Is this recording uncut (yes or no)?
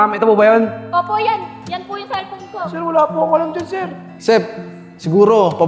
no